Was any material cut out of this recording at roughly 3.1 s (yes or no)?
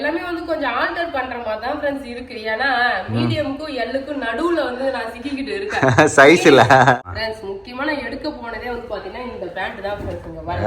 no